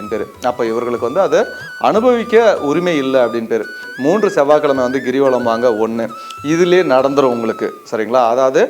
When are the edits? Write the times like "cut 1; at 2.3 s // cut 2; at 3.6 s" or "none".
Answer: cut 1; at 3.8 s